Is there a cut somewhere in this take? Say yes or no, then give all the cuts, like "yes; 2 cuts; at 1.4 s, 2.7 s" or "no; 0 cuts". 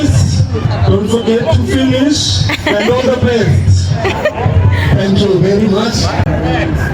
no; 0 cuts